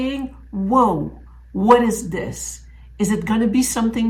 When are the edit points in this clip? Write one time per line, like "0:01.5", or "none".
none